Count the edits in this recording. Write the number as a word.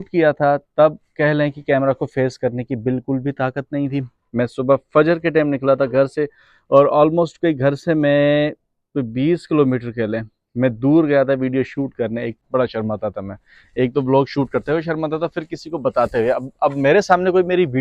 one